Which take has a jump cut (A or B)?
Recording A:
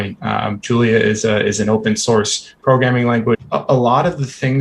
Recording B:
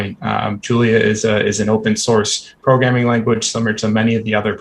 A